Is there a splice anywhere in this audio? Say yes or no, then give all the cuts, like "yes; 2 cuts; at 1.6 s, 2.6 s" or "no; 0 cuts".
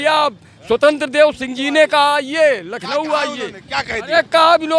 no; 0 cuts